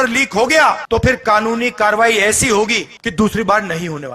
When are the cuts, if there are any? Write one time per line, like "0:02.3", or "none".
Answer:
0:00.8
0:03.0